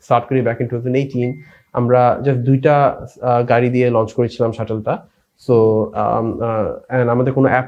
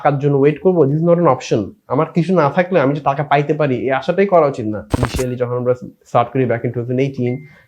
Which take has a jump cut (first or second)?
second